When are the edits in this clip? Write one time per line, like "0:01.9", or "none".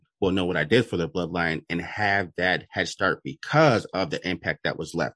none